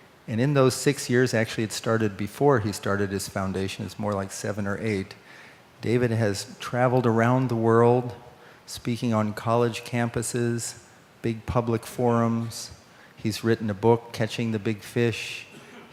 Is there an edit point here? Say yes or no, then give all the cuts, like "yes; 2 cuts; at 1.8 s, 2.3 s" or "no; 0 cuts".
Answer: no; 0 cuts